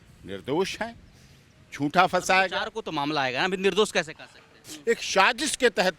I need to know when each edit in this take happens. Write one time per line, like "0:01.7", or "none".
0:04.7